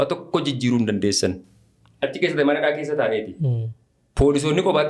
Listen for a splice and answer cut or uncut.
uncut